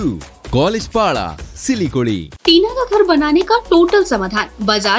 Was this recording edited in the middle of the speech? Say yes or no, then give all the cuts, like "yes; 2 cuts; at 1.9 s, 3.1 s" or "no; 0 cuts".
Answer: yes; 1 cut; at 2.3 s